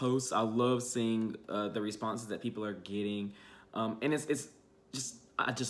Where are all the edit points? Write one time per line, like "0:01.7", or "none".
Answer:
none